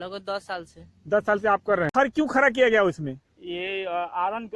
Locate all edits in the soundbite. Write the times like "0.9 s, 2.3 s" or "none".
1.9 s